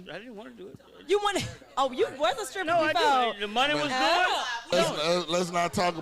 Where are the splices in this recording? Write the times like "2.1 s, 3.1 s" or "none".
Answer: 4.7 s